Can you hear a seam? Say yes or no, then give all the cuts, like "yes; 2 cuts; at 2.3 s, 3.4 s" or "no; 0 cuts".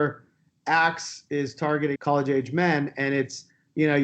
yes; 1 cut; at 1.9 s